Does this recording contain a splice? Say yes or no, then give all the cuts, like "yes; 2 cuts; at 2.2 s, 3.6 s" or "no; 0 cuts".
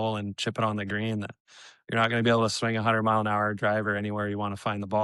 no; 0 cuts